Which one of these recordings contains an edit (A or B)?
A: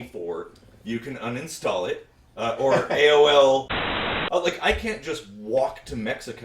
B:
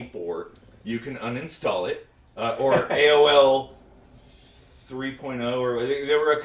A